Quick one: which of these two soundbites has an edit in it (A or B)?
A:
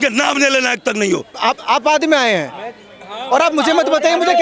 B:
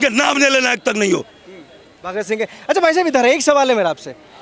A